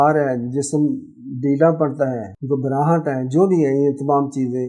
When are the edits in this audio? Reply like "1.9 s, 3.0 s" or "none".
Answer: 2.3 s

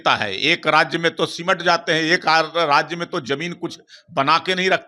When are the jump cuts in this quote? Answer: none

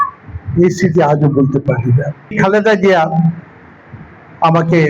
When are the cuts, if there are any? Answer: 2.2 s

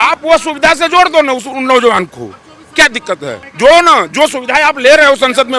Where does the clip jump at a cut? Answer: 3.5 s

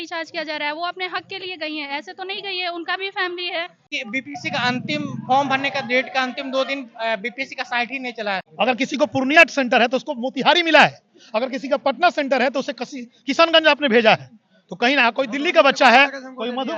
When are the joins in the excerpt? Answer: 4.0 s, 8.5 s

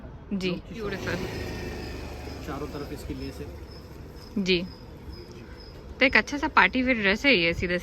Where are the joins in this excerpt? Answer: 1.0 s

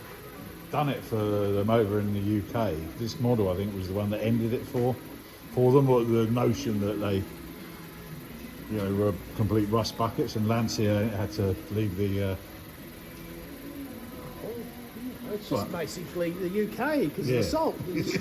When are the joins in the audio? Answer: 2.9 s

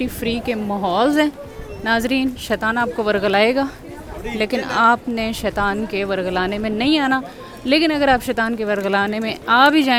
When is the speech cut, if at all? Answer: none

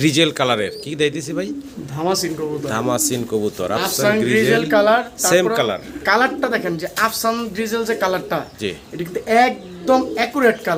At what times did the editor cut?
none

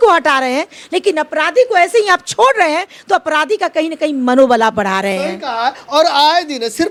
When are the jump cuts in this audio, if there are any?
none

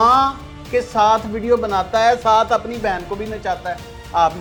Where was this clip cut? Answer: none

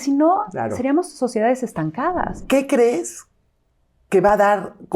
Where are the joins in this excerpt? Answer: 2.4 s

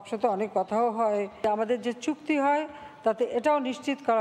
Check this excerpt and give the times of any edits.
1.3 s

